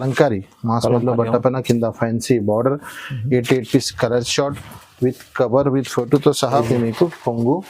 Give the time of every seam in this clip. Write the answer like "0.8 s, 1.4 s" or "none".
6.6 s